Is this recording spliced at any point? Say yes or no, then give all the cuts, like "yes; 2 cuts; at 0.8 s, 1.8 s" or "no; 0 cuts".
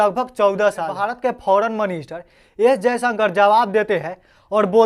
yes; 1 cut; at 1.0 s